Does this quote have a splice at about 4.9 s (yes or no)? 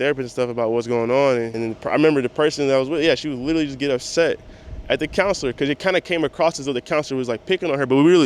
no